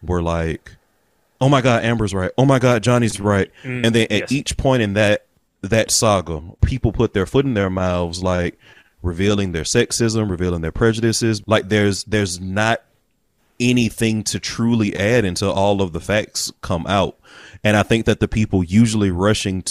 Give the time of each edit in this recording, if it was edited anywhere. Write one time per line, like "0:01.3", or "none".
0:03.6
0:06.6
0:11.4